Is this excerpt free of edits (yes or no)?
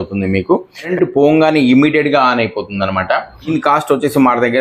no